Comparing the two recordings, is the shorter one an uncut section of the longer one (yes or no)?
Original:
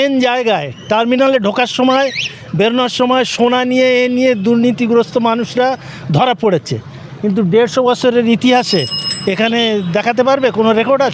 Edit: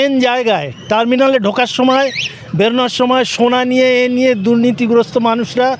yes